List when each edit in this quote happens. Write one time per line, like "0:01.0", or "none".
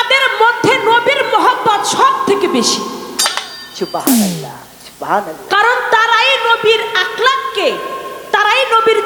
none